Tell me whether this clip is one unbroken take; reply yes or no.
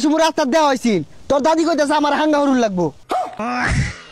no